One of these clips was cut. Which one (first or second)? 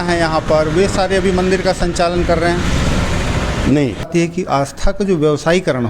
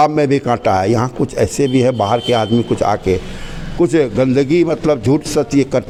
first